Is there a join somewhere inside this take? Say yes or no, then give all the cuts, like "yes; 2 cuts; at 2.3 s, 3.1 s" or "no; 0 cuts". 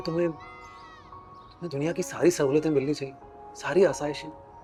no; 0 cuts